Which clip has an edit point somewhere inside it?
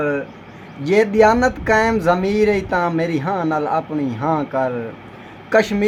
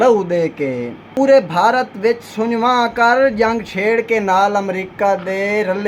second; 1 cut; at 1.2 s

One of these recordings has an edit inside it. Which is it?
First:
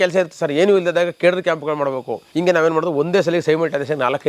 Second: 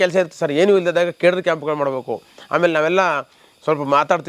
first; 1 cut; at 2.2 s

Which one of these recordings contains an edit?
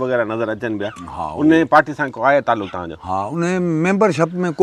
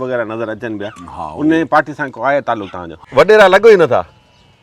second; 1 cut; at 3.0 s

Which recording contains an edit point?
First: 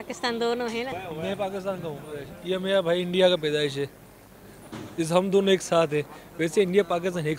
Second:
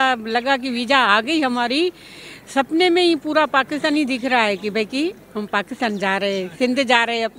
first; 1 cut; at 0.9 s

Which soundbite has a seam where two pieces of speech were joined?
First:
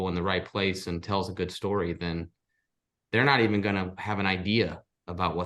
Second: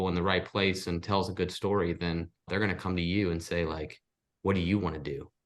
second; 1 cut; at 2.5 s

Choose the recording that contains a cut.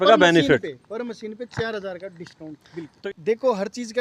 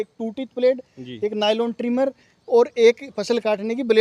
first; 1 cut; at 2.9 s

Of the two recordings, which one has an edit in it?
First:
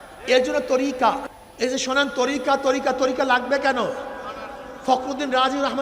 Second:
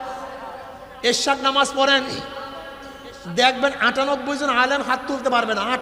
first; 1 cut; at 1.2 s

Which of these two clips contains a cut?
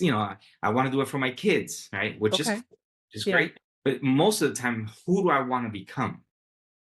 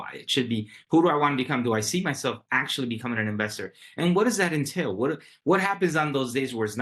first; 1 cut; at 3.6 s

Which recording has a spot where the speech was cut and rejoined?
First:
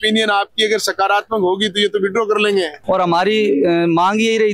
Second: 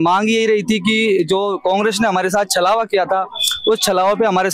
first; 1 cut; at 2.8 s

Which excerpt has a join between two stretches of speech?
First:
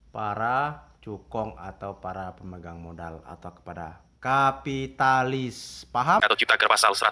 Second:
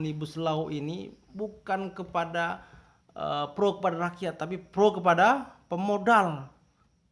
first; 1 cut; at 6.2 s

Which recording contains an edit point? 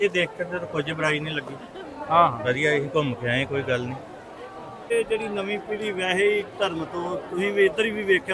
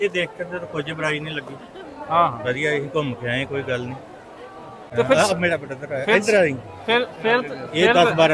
first; 1 cut; at 4.9 s

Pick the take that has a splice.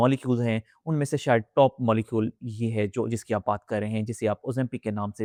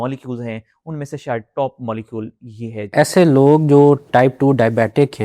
second; 2 cuts; at 2.9 s, 4.1 s

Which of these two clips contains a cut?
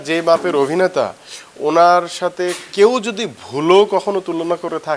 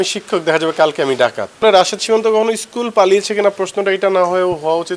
second; 1 cut; at 1.6 s

